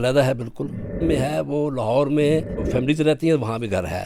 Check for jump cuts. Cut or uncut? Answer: cut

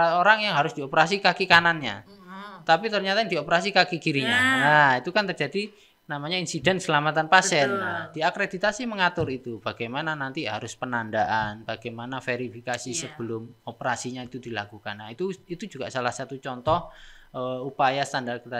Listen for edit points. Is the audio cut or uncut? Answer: uncut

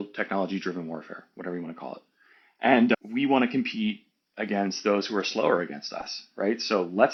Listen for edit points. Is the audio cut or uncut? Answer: uncut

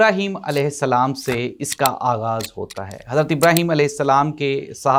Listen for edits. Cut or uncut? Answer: uncut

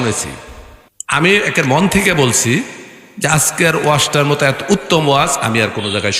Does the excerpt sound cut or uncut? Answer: cut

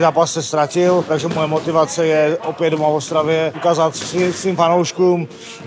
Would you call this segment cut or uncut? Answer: cut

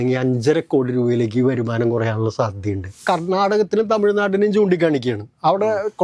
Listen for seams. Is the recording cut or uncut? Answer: cut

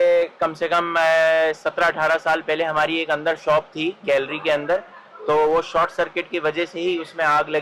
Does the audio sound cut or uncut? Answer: uncut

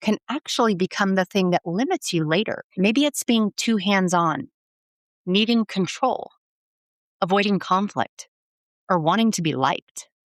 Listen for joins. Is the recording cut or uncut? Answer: cut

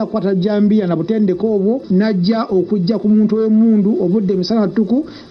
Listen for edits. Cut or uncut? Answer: cut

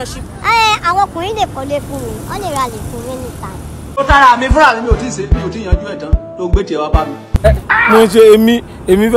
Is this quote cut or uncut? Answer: cut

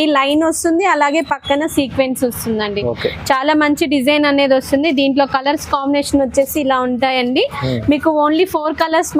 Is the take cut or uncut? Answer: uncut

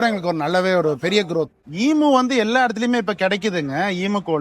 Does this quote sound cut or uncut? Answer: cut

